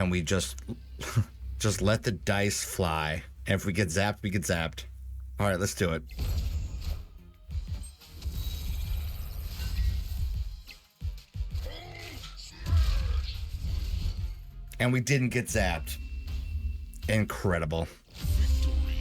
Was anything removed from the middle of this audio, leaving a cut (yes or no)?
yes